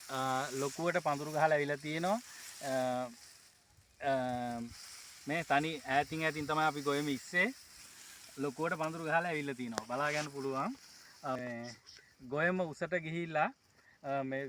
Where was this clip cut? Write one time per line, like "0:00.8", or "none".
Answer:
0:11.4